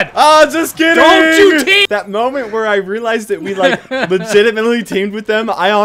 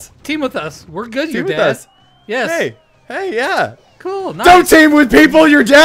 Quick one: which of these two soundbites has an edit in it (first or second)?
first